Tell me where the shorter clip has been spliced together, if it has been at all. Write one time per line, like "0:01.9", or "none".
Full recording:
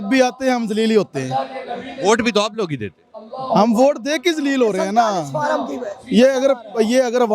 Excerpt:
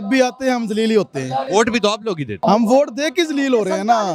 0:01.5
0:02.3